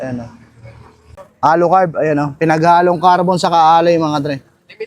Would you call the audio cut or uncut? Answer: cut